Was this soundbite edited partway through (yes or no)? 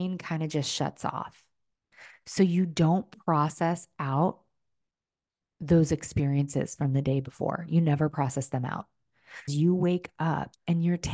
yes